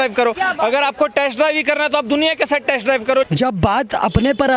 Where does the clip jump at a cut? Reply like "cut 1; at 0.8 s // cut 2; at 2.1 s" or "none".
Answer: cut 1; at 3.3 s